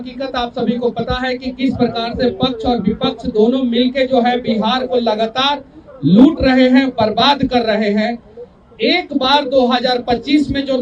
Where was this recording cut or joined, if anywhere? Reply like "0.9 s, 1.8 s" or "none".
none